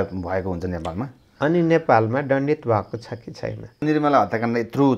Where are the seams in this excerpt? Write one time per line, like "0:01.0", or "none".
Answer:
0:03.8